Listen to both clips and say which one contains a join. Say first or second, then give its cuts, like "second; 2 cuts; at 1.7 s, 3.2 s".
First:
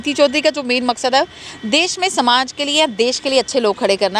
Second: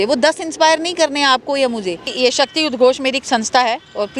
second; 1 cut; at 2.1 s